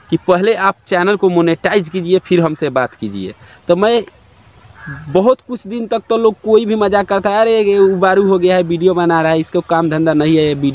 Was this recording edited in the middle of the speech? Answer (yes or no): no